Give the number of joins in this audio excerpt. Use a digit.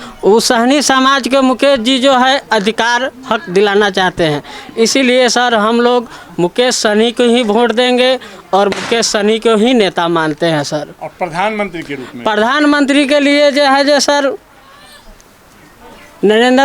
0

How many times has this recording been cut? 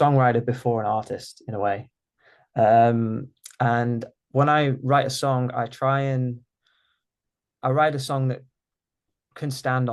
0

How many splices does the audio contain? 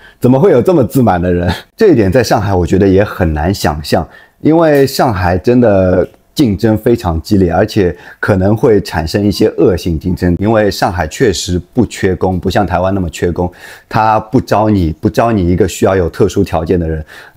2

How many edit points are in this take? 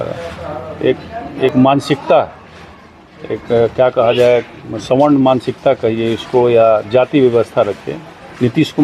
0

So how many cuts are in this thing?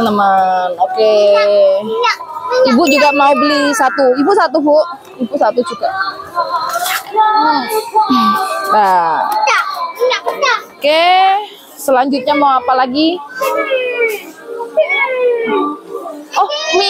0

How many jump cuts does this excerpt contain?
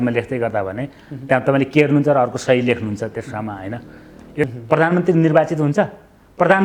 1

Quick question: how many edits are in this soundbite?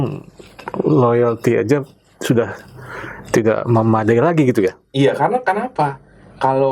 0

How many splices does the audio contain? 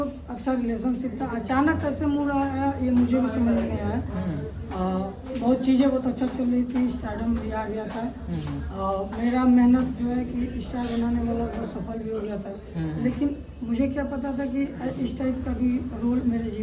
0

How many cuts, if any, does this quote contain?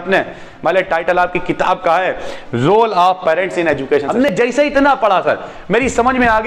1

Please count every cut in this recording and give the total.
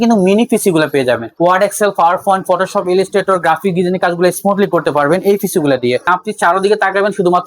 2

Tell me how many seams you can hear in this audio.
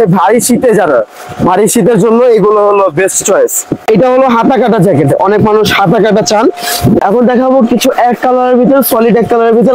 2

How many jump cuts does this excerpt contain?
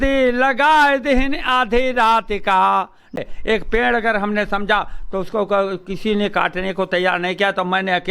1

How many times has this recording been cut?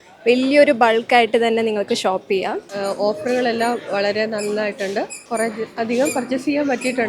2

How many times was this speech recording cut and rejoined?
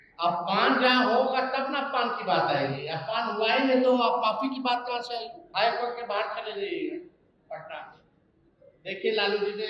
1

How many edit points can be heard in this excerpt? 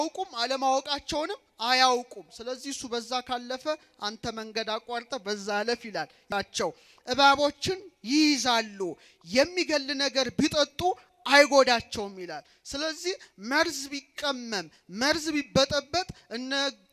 2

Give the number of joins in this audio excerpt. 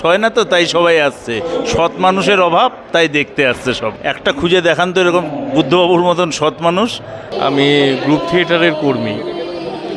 2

